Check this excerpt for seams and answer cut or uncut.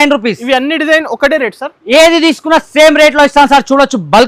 uncut